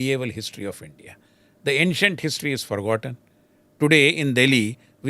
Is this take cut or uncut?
uncut